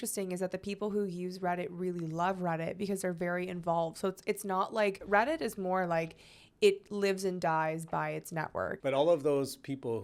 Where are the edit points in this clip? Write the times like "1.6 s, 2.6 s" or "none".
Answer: 5.0 s, 8.8 s